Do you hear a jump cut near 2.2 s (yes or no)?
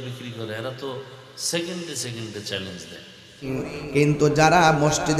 no